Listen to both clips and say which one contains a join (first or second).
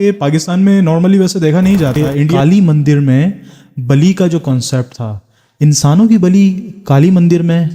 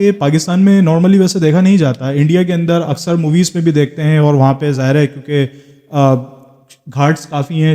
first